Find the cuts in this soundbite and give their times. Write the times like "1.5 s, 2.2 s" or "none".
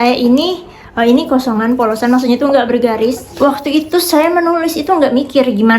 3.3 s